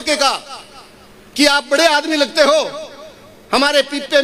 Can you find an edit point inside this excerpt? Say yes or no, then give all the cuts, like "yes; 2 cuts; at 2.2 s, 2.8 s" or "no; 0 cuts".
no; 0 cuts